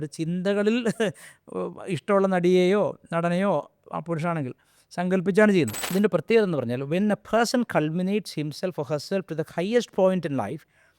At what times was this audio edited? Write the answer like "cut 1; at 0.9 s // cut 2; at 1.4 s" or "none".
cut 1; at 5.8 s